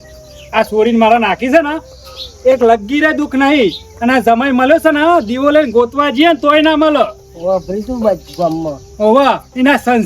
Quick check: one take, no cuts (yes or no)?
yes